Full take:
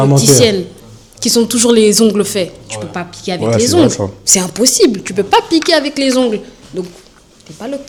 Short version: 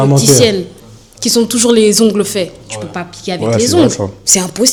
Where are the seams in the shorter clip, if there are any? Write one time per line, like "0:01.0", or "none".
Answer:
none